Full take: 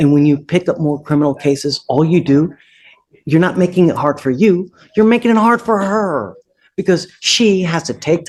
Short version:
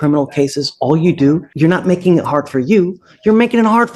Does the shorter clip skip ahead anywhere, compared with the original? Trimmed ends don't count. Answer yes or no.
yes